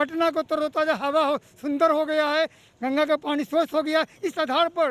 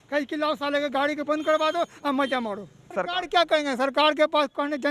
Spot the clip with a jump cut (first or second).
second